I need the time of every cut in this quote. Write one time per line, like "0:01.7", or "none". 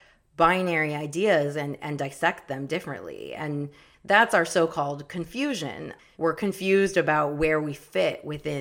0:03.9
0:05.9